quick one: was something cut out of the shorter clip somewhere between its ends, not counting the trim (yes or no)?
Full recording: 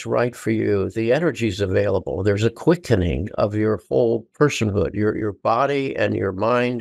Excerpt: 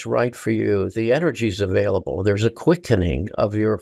no